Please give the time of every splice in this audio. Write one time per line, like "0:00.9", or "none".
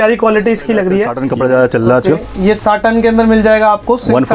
0:01.2